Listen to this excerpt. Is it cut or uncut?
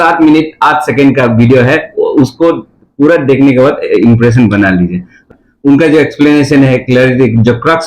cut